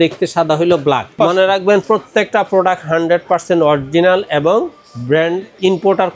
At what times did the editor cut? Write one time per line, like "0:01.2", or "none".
0:01.1